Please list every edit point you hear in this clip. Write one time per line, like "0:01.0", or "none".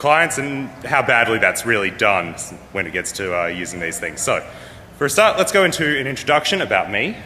none